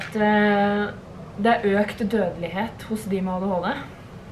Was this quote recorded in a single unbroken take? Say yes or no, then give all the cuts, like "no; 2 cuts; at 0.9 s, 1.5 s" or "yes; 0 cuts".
yes; 0 cuts